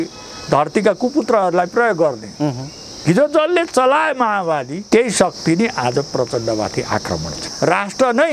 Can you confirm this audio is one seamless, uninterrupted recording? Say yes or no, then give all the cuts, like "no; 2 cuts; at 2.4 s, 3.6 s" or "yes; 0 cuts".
no; 2 cuts; at 4.8 s, 7.4 s